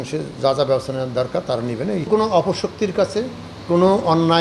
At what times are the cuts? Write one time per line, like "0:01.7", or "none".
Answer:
0:02.1